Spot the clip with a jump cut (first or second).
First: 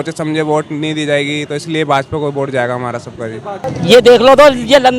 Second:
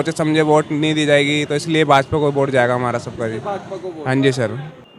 first